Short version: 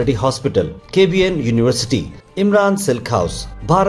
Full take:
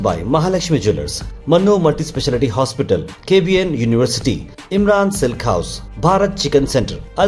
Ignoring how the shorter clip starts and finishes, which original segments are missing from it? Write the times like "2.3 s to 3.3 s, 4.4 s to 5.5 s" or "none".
none